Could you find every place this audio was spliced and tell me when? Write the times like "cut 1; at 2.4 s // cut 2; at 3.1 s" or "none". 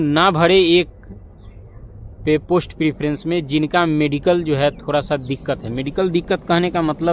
none

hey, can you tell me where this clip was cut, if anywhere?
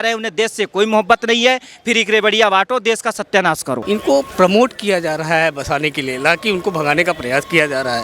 cut 1; at 3.8 s

